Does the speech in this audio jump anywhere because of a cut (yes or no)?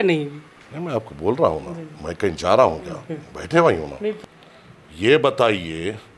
yes